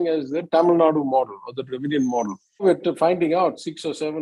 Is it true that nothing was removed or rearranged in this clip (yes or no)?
no